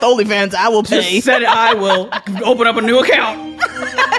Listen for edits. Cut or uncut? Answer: uncut